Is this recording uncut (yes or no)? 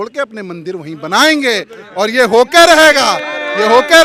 yes